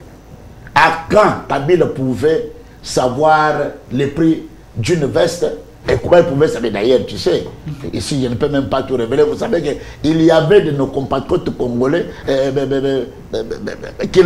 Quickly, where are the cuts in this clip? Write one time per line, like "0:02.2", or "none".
none